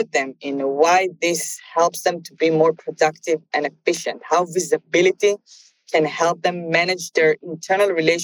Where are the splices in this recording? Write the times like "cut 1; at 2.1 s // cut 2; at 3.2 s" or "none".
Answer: none